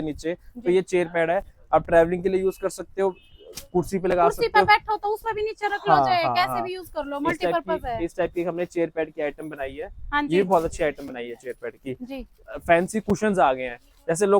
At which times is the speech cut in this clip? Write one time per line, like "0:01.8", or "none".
none